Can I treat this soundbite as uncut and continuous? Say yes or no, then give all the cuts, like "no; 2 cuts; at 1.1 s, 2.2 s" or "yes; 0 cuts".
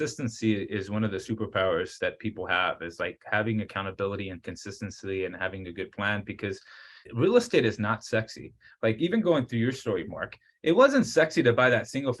no; 2 cuts; at 1.9 s, 6.9 s